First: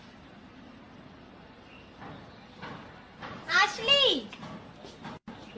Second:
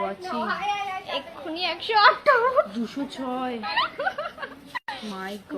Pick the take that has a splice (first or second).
second